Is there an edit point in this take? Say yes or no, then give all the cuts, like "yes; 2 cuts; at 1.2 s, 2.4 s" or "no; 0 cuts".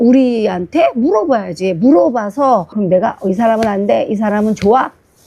yes; 1 cut; at 2.7 s